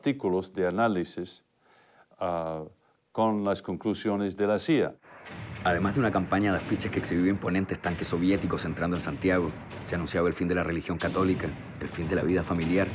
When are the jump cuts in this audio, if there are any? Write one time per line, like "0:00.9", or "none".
0:07.1